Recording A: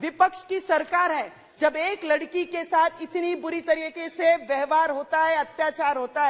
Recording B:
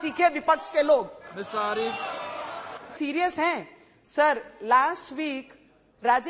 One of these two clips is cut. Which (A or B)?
B